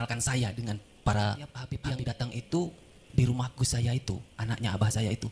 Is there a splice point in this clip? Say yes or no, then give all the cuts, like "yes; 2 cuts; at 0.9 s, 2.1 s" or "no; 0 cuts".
yes; 1 cut; at 1.7 s